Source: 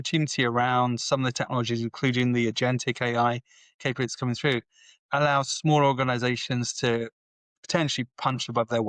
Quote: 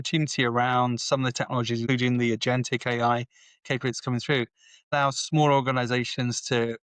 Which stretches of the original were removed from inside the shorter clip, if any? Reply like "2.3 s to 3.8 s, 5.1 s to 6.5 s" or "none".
1.8 s to 2.0 s, 5.1 s to 5.3 s